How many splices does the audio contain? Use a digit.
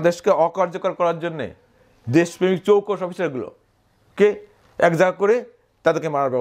0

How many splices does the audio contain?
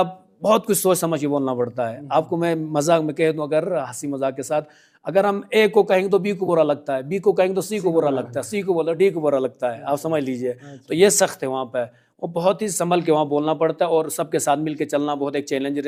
0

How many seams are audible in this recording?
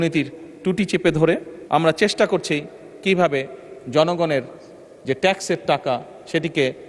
1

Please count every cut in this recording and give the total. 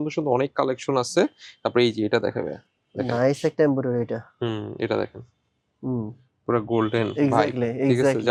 0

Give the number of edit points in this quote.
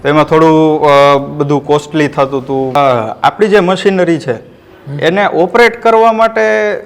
1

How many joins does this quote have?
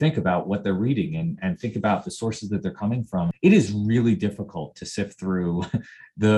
1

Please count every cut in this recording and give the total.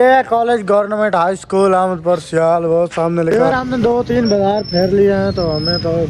1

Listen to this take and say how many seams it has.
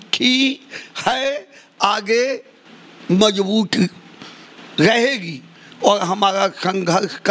0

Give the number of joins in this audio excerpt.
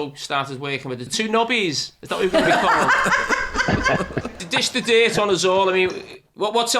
2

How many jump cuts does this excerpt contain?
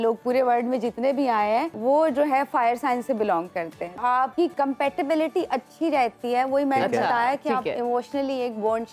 2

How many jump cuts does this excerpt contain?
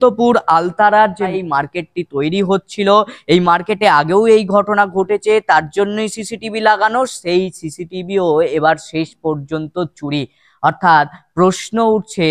1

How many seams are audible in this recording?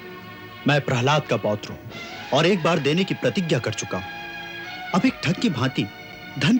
0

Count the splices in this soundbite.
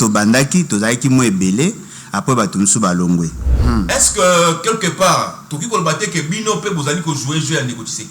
1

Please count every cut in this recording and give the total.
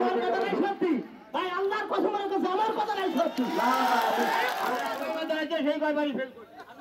1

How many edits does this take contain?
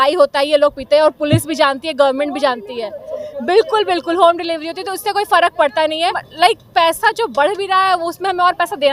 1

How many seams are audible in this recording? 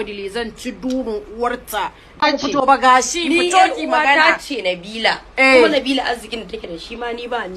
1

